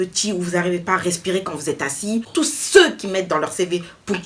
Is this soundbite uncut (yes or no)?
no